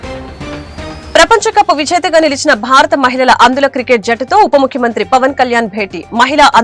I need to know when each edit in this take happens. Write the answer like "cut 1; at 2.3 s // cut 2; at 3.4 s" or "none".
cut 1; at 1.0 s